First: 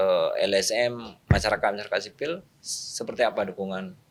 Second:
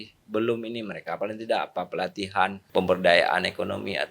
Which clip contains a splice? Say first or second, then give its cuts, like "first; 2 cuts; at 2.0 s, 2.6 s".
second; 1 cut; at 2.6 s